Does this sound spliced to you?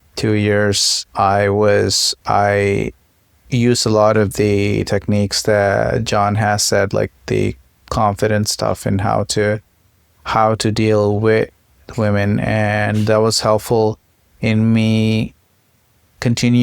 no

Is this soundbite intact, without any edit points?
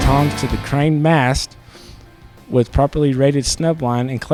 yes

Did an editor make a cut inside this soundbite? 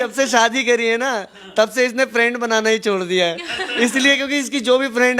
no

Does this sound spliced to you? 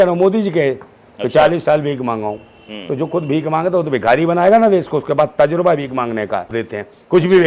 yes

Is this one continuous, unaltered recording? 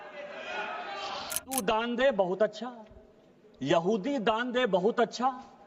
no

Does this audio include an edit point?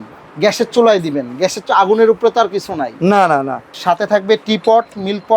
yes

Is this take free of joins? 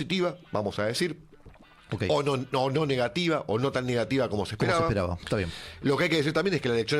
yes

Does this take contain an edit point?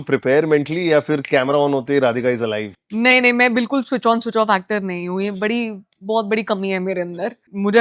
no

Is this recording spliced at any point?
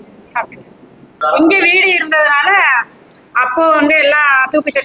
yes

